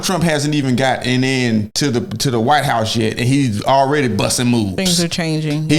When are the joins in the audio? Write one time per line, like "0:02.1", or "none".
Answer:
none